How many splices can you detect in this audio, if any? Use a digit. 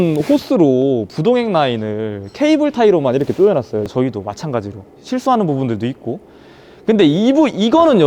1